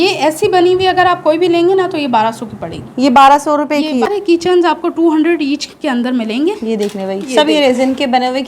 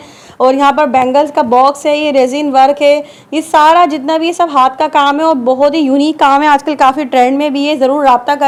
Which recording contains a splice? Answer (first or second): first